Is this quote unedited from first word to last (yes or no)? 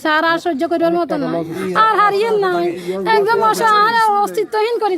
no